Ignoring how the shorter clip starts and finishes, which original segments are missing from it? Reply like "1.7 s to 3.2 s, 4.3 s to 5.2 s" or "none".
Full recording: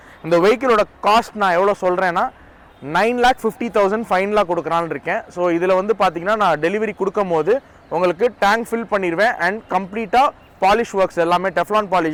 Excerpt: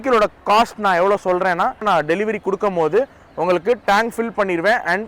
2.4 s to 6.4 s

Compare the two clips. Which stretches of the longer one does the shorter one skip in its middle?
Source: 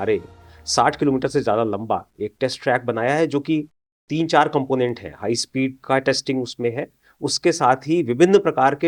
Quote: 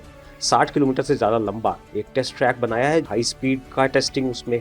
3.3 s to 5.2 s

